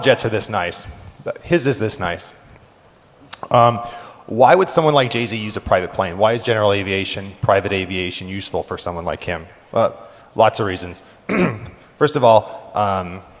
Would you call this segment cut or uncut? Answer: cut